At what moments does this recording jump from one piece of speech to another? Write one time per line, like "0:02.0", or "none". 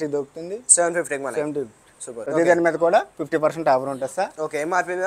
0:02.2